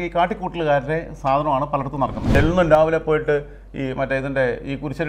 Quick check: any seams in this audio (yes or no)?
yes